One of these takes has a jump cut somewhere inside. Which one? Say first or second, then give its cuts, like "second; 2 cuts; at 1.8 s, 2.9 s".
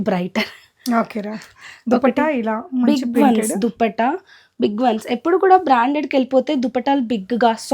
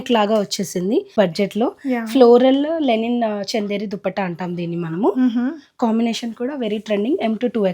second; 1 cut; at 1.1 s